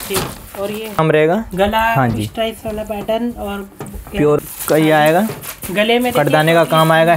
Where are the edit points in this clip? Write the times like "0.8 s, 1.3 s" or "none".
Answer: 1.0 s, 4.4 s